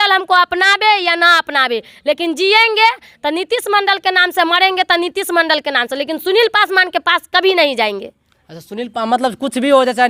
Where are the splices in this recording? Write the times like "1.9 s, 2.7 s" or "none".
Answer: none